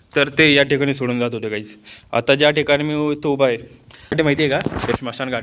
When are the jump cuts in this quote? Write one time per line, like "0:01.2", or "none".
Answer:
0:04.1